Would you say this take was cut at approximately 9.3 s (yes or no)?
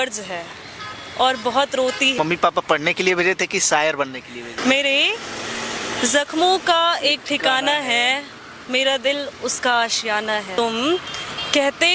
no